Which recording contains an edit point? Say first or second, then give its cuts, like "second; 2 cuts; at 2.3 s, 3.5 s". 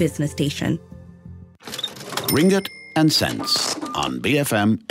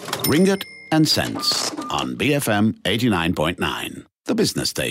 first; 1 cut; at 1.1 s